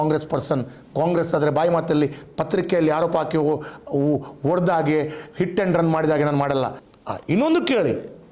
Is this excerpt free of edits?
no; 1 cut; at 6.8 s

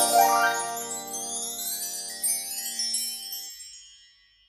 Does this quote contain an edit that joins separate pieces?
no; 0 cuts

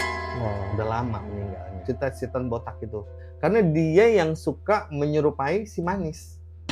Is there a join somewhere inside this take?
yes; 1 cut; at 1.8 s

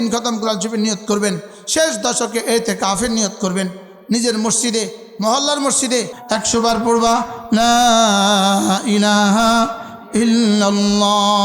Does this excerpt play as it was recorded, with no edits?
no; 1 cut; at 6.2 s

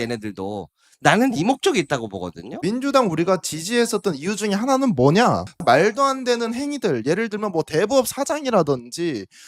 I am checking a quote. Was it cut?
yes; 1 cut; at 2.5 s

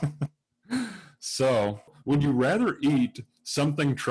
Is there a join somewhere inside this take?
yes; 1 cut; at 1.9 s

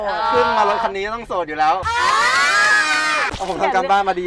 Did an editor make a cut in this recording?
yes; 2 cuts; at 1.8 s, 3.3 s

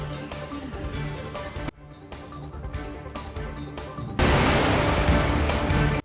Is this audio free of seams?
yes; 0 cuts

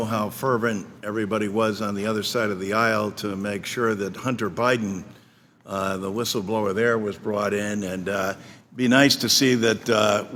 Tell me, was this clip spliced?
no; 0 cuts

